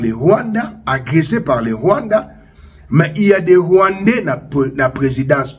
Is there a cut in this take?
no; 0 cuts

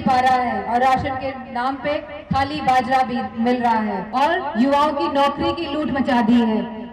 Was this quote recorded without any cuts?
no; 1 cut; at 4.0 s

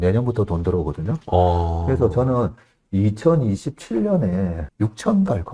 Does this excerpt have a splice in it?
yes; 1 cut; at 4.6 s

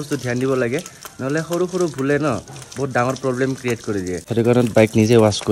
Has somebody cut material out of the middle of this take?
no; 0 cuts

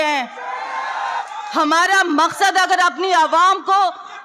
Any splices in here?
yes; 1 cut; at 1.2 s

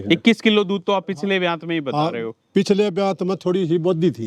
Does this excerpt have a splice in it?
no; 0 cuts

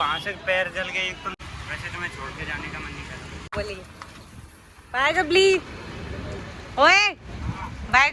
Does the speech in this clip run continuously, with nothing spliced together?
no; 2 cuts; at 1.3 s, 3.5 s

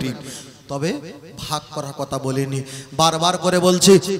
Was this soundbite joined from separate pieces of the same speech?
no; 0 cuts

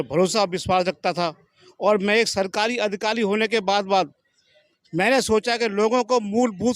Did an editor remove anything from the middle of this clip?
no; 0 cuts

